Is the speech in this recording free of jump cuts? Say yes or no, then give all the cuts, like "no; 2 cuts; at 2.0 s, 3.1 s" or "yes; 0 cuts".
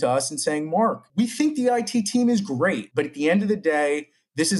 no; 2 cuts; at 1.0 s, 2.8 s